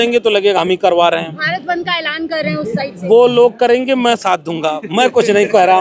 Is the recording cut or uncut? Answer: uncut